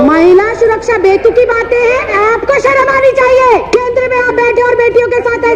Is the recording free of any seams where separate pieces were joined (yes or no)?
no